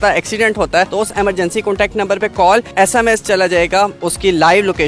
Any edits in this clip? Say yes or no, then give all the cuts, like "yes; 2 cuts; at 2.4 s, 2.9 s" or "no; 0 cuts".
yes; 3 cuts; at 0.9 s, 2.7 s, 4.0 s